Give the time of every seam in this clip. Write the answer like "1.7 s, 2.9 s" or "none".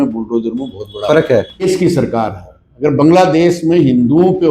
1.7 s